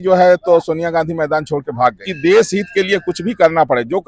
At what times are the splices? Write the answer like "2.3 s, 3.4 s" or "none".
2.1 s